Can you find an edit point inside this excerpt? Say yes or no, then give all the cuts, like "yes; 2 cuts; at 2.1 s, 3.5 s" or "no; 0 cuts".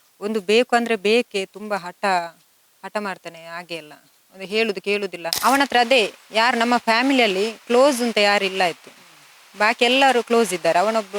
yes; 1 cut; at 5.3 s